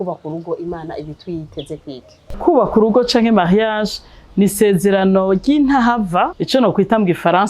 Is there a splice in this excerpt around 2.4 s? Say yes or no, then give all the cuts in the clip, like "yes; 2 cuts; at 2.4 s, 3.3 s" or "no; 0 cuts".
yes; 2 cuts; at 2.4 s, 6.4 s